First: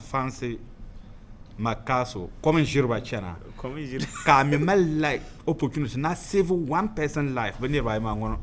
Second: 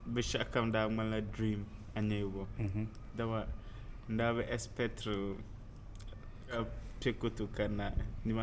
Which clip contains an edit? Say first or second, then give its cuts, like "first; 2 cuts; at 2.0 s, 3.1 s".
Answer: second; 1 cut; at 6.6 s